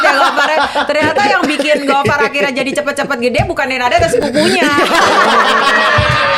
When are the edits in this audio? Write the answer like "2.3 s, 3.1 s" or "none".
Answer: none